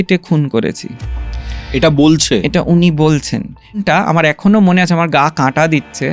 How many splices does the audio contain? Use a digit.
1